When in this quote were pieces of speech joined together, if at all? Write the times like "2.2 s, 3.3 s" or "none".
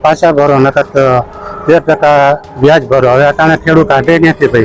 none

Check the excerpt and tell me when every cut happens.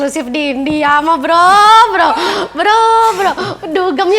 none

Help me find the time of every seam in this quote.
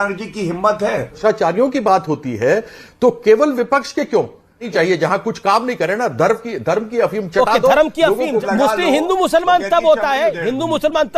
1.2 s, 4.7 s, 8.4 s

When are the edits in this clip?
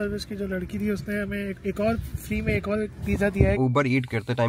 3.4 s

